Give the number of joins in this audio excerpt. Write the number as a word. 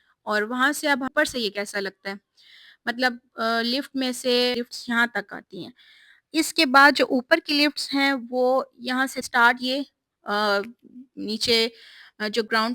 three